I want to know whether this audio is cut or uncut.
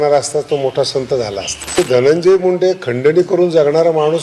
cut